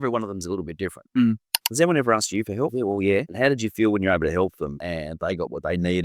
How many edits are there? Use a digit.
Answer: 3